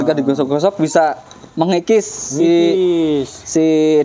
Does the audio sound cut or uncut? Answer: uncut